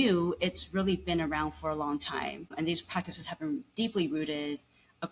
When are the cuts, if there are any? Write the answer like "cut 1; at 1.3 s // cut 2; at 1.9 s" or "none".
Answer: cut 1; at 2.5 s